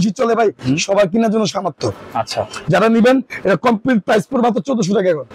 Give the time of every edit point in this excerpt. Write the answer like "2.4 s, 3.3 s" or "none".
none